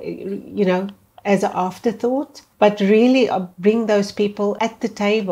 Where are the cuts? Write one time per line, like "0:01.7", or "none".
0:02.4
0:03.5
0:04.6

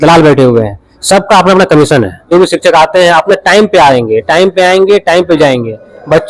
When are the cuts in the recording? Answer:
0:02.3

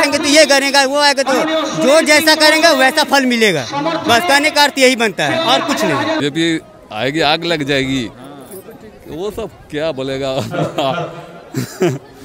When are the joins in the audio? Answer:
0:06.2

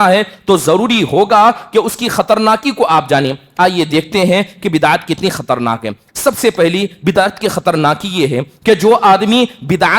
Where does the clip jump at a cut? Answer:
none

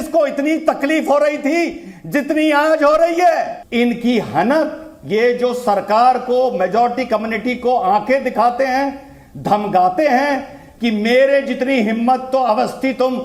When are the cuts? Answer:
0:03.6

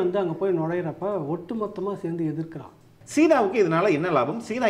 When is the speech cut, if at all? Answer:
0:03.0

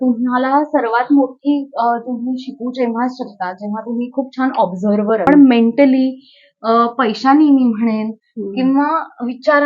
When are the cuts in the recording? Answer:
0:05.3

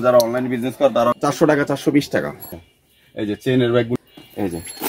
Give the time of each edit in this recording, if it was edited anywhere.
0:01.2
0:02.6
0:04.0

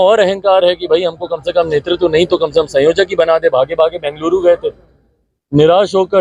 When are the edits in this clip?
none

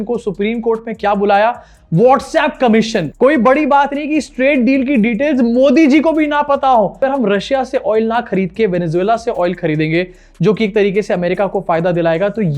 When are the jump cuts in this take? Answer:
0:03.0
0:07.0

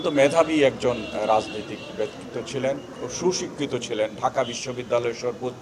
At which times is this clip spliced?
0:03.0

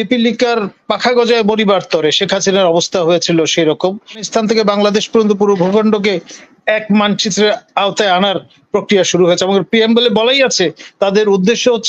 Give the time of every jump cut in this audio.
0:04.2

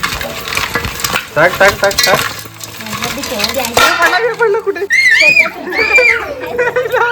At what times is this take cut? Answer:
0:05.0

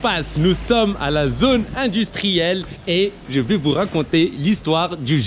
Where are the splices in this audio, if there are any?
none

